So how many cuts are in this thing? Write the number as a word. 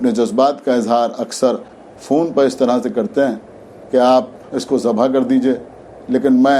one